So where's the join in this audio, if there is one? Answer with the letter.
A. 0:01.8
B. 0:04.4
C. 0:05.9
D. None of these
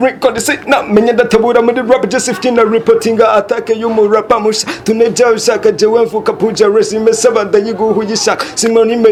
D